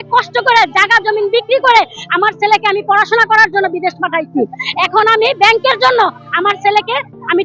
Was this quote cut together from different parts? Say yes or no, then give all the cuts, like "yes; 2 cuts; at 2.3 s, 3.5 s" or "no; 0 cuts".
no; 0 cuts